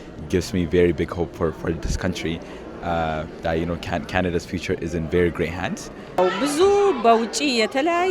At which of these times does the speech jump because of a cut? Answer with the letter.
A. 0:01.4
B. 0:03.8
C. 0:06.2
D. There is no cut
C